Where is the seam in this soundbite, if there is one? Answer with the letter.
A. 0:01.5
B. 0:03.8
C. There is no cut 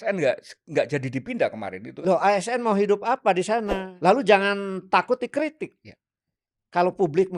B